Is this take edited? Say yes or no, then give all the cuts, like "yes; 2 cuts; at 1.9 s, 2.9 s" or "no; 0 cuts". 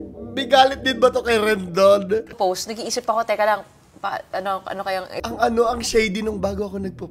no; 0 cuts